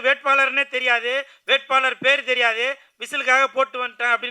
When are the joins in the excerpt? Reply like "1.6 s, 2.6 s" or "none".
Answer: none